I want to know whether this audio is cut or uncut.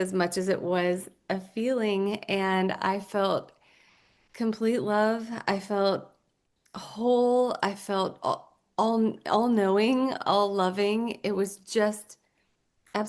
uncut